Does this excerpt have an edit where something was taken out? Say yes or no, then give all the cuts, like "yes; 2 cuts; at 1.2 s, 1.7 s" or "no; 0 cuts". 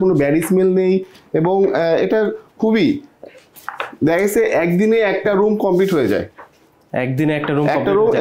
no; 0 cuts